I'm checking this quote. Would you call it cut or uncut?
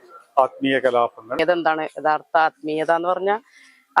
cut